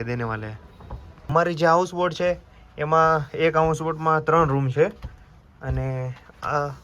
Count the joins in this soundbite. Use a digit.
0